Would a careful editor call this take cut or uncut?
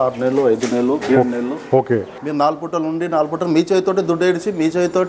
cut